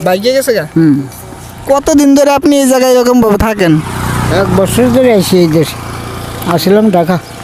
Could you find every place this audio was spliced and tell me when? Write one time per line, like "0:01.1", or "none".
none